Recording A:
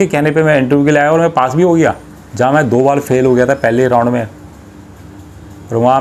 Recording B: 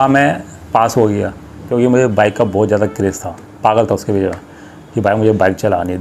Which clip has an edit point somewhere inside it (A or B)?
B